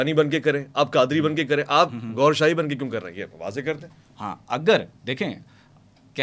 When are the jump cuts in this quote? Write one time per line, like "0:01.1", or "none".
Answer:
none

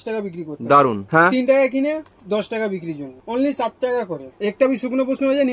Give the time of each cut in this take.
0:01.0
0:03.1
0:04.3

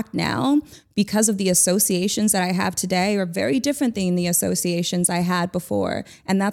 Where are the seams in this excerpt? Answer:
none

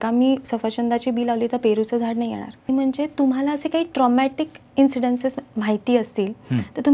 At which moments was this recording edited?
0:02.7

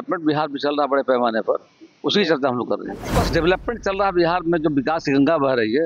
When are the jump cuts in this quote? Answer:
0:03.0

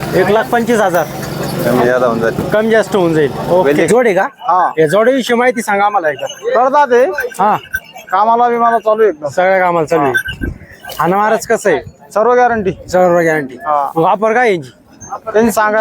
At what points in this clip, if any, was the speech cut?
0:03.9

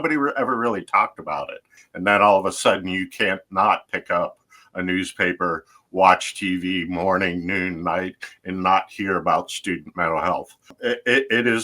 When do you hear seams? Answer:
0:01.8
0:10.8

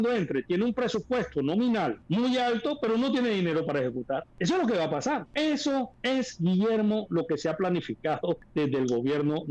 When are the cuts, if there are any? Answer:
0:02.0
0:04.3
0:05.3
0:05.9
0:08.5

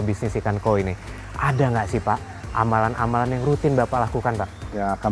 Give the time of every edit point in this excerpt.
none

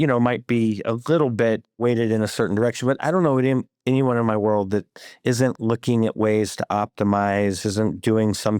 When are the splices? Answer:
0:01.8

